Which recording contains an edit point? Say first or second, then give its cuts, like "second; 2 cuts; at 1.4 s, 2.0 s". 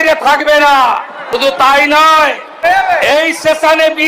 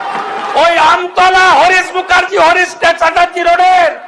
first; 2 cuts; at 1.3 s, 2.6 s